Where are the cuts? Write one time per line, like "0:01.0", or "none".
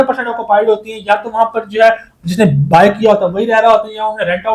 none